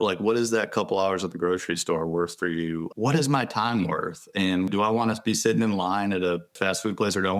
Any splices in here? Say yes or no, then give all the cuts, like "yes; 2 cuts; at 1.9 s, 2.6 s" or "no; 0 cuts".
yes; 3 cuts; at 2.9 s, 4.7 s, 6.6 s